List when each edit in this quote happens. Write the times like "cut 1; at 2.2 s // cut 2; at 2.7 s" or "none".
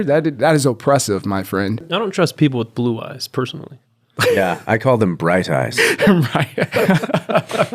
cut 1; at 1.8 s // cut 2; at 6.7 s